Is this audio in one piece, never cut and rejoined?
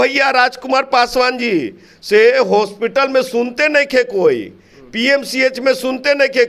yes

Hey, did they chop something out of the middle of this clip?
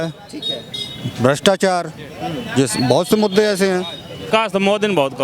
yes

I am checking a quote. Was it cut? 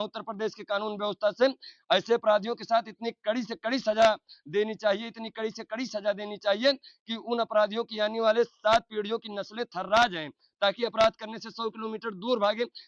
no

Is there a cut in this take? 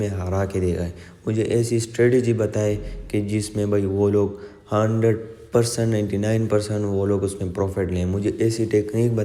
no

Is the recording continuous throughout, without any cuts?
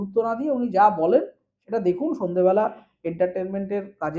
yes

